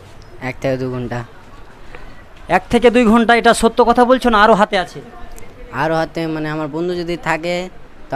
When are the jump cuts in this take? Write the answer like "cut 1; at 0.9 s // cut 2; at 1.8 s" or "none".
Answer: none

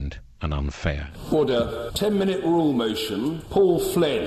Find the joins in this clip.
cut 1; at 1.1 s // cut 2; at 1.9 s // cut 3; at 3.4 s

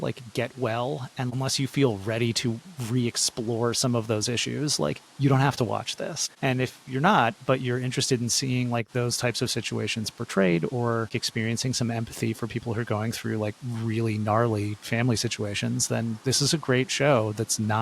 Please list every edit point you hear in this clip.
cut 1; at 1.3 s

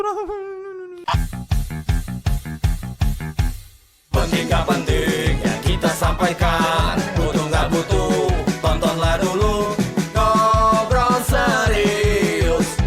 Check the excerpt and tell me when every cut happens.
cut 1; at 0.9 s

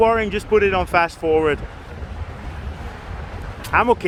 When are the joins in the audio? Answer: none

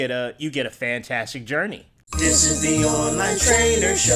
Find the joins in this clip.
cut 1; at 1.9 s

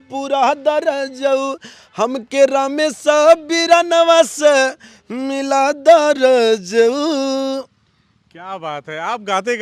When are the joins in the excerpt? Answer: none

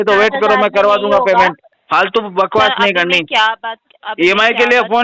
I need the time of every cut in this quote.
cut 1; at 1.7 s

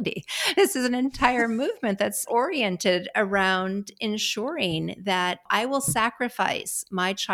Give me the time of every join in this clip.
cut 1; at 2.2 s // cut 2; at 5.4 s

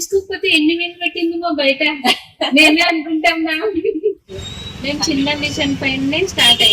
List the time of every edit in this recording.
cut 1; at 4.3 s

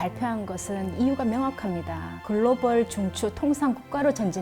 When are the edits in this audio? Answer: cut 1; at 2.2 s

